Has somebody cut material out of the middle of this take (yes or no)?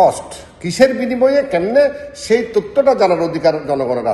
no